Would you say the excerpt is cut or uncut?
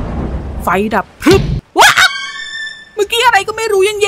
cut